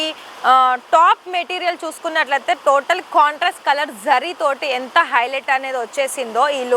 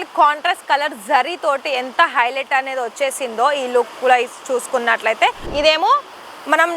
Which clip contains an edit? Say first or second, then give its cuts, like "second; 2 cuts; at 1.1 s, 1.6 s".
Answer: second; 1 cut; at 5.5 s